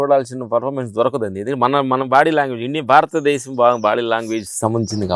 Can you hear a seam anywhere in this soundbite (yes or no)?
no